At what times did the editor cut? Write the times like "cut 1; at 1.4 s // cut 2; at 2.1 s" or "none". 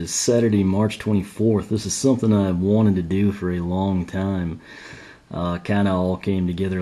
none

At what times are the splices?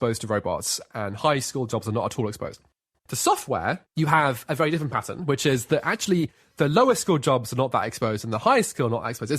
cut 1; at 2.8 s // cut 2; at 3.9 s

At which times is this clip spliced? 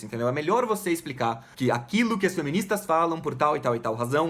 cut 1; at 1.5 s

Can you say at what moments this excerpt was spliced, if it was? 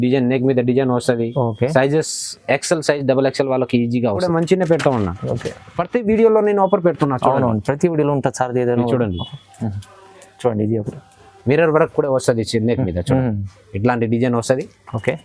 cut 1; at 4.2 s // cut 2; at 11.3 s

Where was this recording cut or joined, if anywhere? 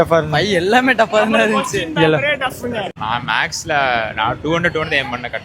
cut 1; at 2.9 s

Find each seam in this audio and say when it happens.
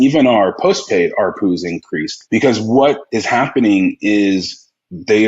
cut 1; at 2.1 s // cut 2; at 3.1 s

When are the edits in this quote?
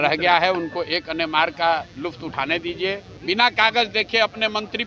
cut 1; at 3.1 s

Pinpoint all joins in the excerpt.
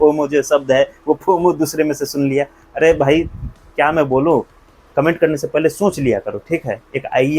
none

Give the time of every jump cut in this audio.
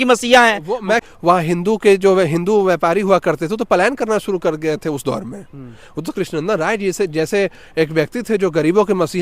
cut 1; at 1.0 s

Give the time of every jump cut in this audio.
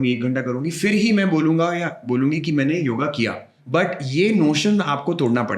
cut 1; at 3.5 s

